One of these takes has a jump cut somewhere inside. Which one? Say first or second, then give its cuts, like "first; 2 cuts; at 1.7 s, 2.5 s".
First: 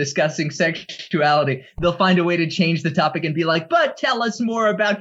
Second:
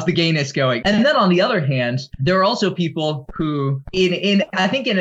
second; 3 cuts; at 0.8 s, 2.1 s, 3.8 s